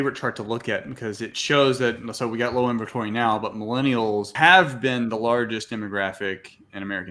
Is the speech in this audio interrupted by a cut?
yes; 2 cuts; at 1.4 s, 4.3 s

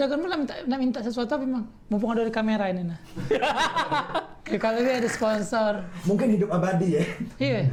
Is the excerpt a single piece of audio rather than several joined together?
yes; 0 cuts

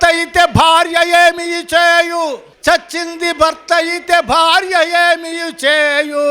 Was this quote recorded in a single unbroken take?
no; 1 cut; at 2.5 s

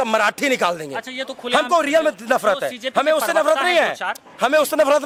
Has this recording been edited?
no; 0 cuts

